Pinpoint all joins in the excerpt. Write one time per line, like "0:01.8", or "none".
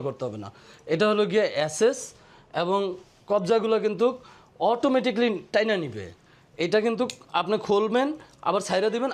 none